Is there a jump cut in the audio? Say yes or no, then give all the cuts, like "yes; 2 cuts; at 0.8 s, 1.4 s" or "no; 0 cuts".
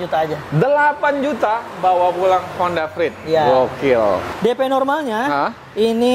yes; 1 cut; at 4.3 s